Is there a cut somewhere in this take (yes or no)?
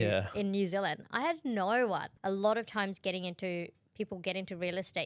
yes